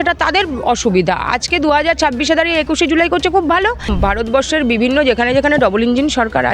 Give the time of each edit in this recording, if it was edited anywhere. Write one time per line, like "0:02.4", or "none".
0:03.9